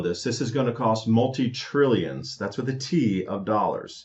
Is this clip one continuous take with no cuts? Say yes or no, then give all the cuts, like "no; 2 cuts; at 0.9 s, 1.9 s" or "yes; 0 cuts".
yes; 0 cuts